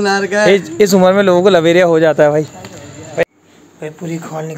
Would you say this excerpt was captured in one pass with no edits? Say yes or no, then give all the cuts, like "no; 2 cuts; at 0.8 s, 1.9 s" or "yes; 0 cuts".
no; 1 cut; at 3.2 s